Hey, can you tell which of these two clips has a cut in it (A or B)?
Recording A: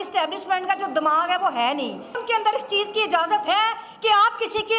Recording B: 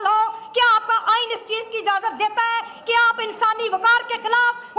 A